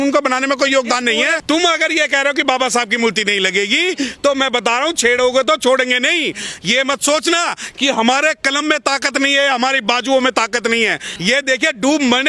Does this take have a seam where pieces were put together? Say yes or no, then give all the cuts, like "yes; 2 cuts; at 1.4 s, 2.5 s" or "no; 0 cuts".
yes; 2 cuts; at 1.4 s, 11.1 s